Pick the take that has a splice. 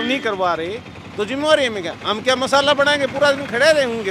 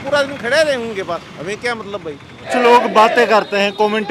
second; 1 cut; at 2.4 s

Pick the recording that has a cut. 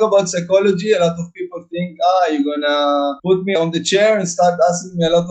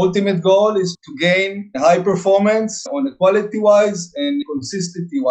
second; 2 cuts; at 2.8 s, 4.4 s

